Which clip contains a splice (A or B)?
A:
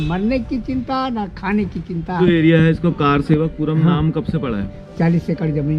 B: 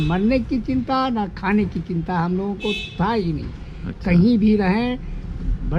A